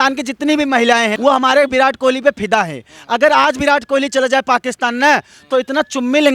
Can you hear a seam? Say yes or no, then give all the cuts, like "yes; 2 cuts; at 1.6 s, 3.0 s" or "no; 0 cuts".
yes; 1 cut; at 1.1 s